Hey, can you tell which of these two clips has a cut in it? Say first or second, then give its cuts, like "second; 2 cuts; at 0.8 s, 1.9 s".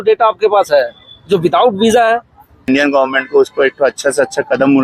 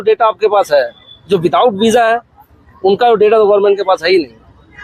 first; 1 cut; at 2.7 s